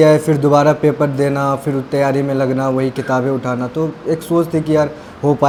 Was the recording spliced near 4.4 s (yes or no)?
no